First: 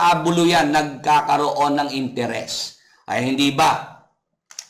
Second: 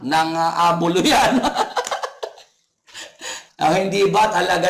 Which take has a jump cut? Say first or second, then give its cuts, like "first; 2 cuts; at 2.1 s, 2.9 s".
second; 1 cut; at 3.4 s